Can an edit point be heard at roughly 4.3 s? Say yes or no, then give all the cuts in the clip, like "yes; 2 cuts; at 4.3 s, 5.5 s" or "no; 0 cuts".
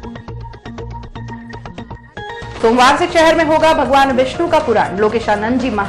no; 1 cut; at 2.5 s